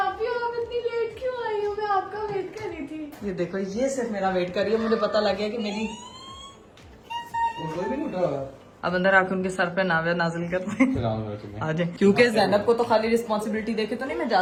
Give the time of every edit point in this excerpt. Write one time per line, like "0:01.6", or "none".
none